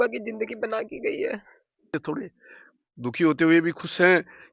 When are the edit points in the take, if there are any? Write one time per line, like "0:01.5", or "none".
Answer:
0:02.0